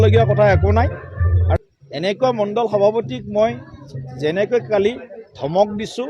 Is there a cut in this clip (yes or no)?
yes